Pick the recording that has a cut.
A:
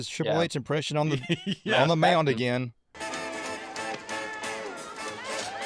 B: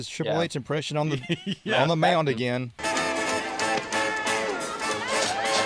B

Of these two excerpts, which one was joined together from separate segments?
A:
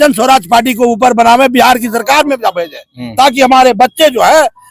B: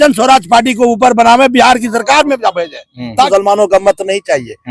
B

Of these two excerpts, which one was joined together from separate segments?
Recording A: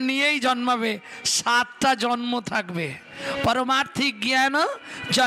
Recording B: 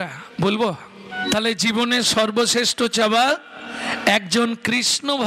B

